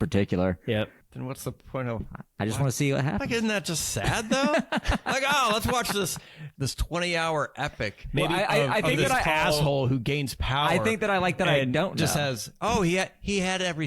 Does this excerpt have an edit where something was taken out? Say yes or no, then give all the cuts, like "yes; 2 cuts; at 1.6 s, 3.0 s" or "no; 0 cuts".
yes; 2 cuts; at 1.0 s, 6.5 s